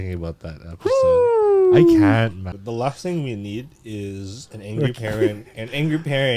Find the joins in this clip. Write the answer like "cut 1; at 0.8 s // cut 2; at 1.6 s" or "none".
cut 1; at 2.6 s